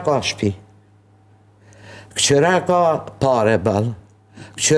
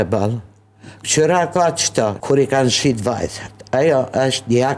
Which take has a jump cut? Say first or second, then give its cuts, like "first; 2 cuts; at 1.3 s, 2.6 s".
second; 1 cut; at 2.2 s